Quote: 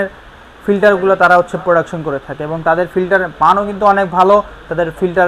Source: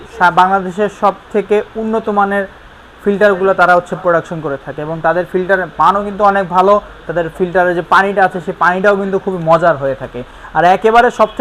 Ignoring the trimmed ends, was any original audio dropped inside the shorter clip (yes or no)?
no